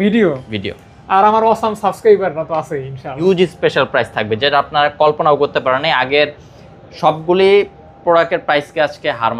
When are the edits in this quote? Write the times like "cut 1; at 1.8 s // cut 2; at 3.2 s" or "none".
cut 1; at 3.1 s